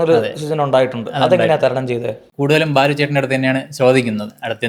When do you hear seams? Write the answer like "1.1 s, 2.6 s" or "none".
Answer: 2.2 s